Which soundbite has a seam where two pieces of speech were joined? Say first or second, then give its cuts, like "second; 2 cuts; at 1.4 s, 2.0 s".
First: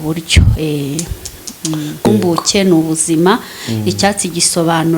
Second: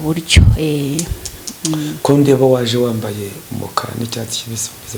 first; 1 cut; at 2.1 s